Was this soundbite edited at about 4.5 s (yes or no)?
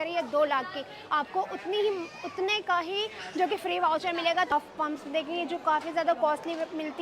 yes